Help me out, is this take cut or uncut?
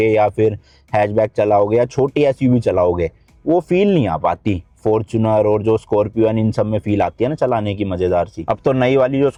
uncut